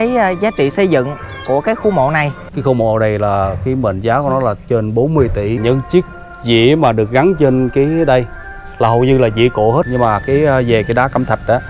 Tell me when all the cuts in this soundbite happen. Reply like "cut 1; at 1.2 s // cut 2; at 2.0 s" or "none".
cut 1; at 2.4 s // cut 2; at 5.6 s // cut 3; at 9.9 s